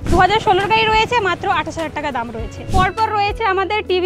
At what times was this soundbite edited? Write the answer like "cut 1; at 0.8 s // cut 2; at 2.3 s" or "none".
cut 1; at 2.6 s